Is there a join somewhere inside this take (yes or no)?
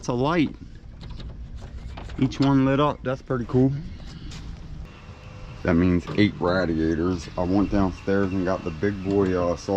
yes